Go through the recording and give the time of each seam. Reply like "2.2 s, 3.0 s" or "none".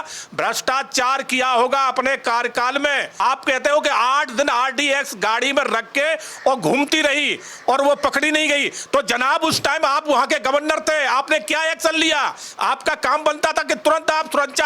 3.1 s